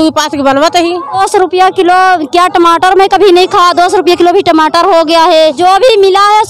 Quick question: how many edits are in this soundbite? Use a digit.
2